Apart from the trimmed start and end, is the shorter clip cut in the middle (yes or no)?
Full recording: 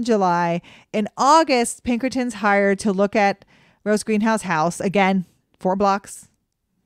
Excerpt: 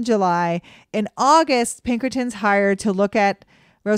no